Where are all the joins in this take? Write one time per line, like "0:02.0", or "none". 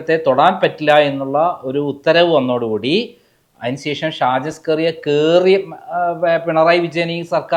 none